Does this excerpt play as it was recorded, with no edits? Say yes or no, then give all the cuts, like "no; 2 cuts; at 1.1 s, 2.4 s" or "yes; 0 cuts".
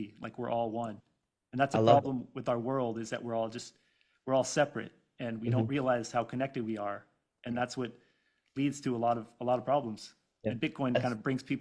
yes; 0 cuts